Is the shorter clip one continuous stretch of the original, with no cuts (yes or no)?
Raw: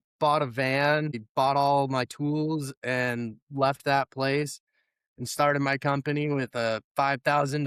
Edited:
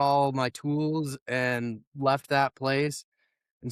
yes